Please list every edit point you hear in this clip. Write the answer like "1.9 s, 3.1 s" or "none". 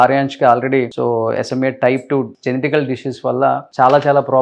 0.9 s, 2.3 s